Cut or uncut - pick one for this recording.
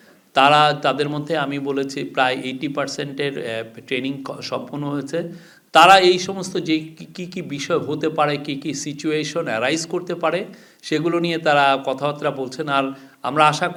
uncut